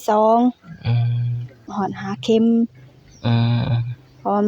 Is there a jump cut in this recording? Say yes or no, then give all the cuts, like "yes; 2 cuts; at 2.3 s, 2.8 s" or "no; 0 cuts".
yes; 1 cut; at 1.7 s